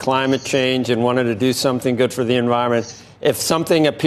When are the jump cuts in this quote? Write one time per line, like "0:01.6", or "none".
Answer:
none